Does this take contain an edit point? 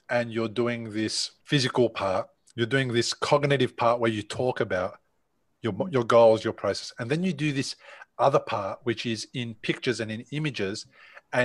yes; 1 cut; at 1.3 s

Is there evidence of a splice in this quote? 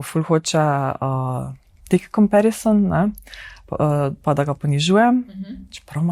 no; 0 cuts

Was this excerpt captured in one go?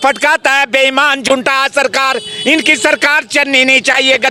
yes; 0 cuts

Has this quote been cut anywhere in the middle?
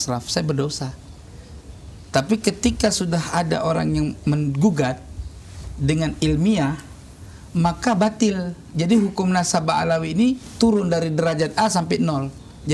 no; 0 cuts

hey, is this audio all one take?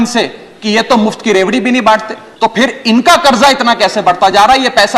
no; 1 cut; at 2.2 s

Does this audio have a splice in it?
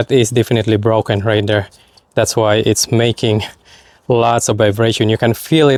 no; 0 cuts

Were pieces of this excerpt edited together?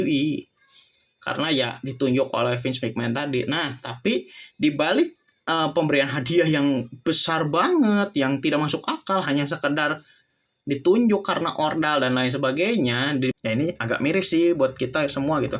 yes; 1 cut; at 13.3 s

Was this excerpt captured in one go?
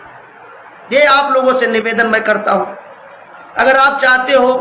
yes; 0 cuts

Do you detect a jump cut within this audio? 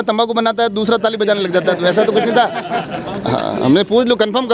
no; 0 cuts

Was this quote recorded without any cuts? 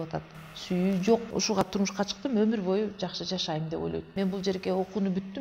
no; 2 cuts; at 1.7 s, 4.1 s

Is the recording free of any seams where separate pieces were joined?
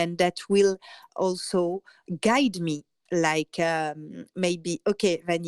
no; 3 cuts; at 1.1 s, 2.0 s, 2.9 s

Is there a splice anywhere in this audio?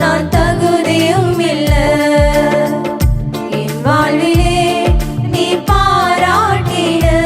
no; 0 cuts

